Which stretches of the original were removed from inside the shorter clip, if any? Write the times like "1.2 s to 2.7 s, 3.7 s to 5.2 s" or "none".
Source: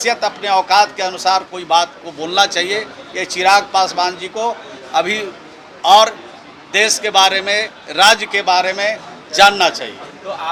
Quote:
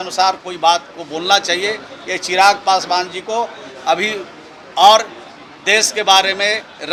none